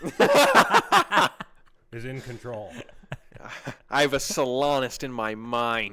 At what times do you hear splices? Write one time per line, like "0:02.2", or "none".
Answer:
none